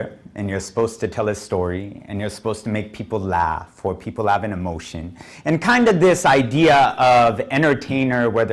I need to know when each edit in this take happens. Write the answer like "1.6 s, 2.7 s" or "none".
none